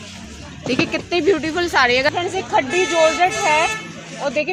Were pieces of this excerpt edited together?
yes; 1 cut; at 2.1 s

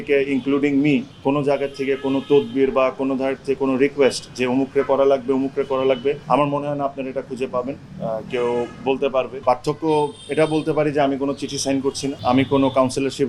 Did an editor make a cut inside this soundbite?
yes; 4 cuts; at 1.1 s, 6.2 s, 9.4 s, 12.2 s

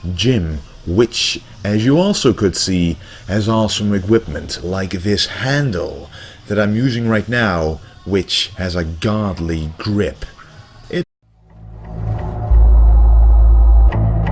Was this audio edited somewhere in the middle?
no; 0 cuts

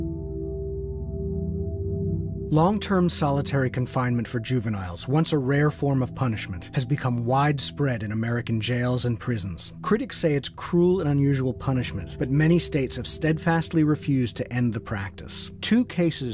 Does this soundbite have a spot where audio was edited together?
no; 0 cuts

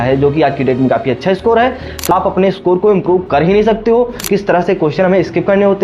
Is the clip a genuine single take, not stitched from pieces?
no; 2 cuts; at 2.1 s, 4.2 s

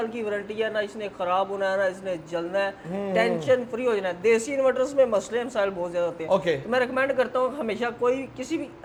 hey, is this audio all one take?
yes; 0 cuts

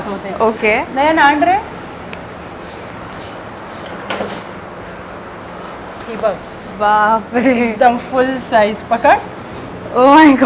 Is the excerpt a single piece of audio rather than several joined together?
yes; 0 cuts

